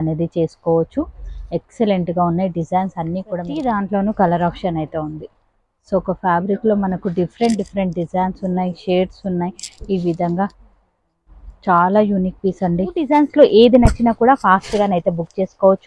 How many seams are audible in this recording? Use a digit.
2